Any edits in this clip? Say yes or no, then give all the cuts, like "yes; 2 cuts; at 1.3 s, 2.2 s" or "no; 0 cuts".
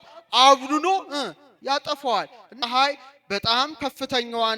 yes; 1 cut; at 2.5 s